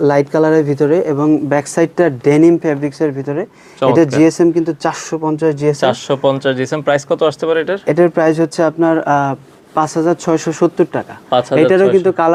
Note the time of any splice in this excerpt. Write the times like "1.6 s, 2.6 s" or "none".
none